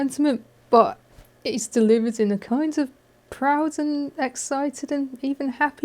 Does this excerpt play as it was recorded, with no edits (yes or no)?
yes